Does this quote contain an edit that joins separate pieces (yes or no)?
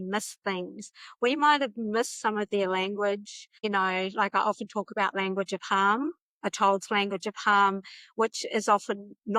no